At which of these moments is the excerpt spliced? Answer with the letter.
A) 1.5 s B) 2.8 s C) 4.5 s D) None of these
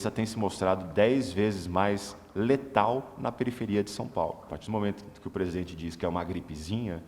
C